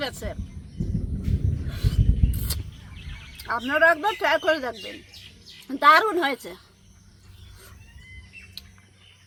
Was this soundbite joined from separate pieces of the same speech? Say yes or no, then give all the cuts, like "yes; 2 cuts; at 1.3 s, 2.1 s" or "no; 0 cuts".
no; 0 cuts